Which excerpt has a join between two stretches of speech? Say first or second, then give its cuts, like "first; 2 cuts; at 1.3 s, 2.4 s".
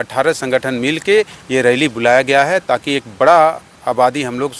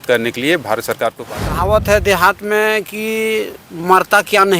second; 1 cut; at 1.2 s